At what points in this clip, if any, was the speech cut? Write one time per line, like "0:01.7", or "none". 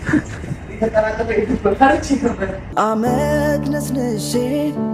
0:02.7